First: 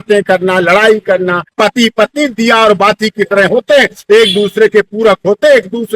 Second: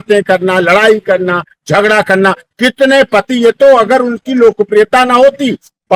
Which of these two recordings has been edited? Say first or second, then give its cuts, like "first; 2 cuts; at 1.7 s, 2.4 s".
first; 1 cut; at 1.5 s